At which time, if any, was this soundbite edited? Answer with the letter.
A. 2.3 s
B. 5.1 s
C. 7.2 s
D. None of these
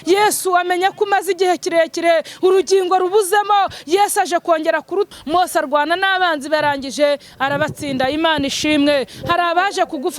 B